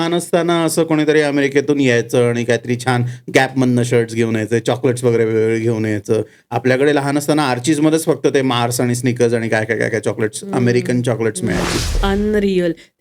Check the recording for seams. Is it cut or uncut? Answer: cut